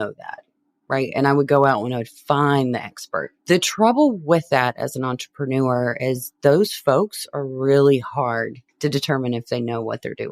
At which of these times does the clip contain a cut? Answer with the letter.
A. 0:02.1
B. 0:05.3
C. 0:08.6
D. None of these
C